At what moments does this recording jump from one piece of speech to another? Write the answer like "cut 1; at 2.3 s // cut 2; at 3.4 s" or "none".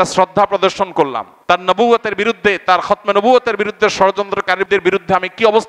cut 1; at 1.3 s // cut 2; at 4.6 s

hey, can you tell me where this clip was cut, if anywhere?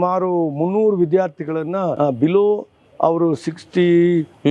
cut 1; at 1.9 s

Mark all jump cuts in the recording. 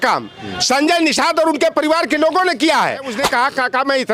cut 1; at 3.1 s

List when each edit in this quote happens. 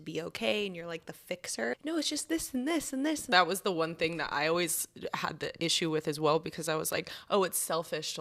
cut 1; at 1.7 s // cut 2; at 3.3 s

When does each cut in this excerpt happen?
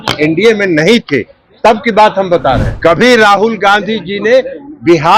cut 1; at 2.7 s

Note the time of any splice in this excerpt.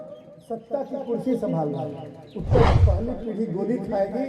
cut 1; at 2.8 s

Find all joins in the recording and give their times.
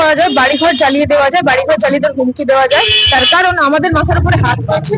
none

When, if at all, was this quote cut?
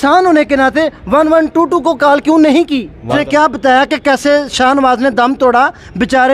cut 1; at 3.1 s

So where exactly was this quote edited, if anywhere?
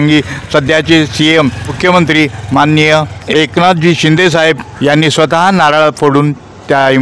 cut 1; at 1.8 s // cut 2; at 3.2 s // cut 3; at 4.7 s

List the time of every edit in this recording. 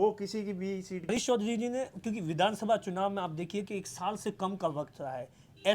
cut 1; at 1.2 s

